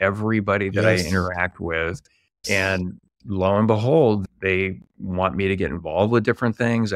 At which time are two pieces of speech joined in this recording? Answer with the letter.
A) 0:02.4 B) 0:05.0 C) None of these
A